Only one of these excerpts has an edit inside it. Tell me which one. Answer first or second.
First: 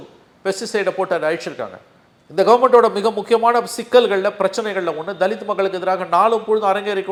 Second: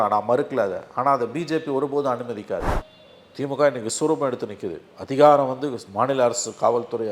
second